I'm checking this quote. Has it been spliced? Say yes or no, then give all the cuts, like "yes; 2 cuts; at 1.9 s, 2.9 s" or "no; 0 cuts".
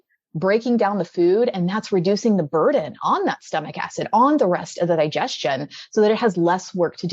no; 0 cuts